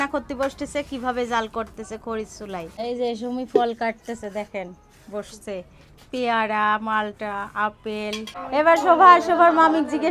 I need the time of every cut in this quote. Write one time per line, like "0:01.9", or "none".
0:02.7
0:08.3